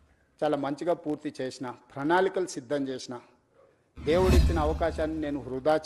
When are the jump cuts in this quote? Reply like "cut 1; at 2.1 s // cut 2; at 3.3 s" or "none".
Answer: none